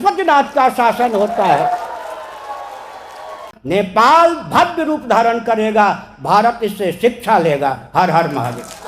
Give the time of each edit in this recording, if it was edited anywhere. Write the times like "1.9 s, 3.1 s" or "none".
3.5 s